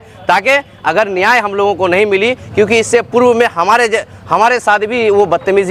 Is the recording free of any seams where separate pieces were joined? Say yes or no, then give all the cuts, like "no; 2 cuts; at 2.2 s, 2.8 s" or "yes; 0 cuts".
yes; 0 cuts